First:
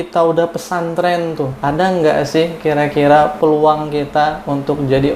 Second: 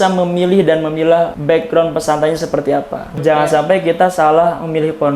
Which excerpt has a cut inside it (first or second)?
second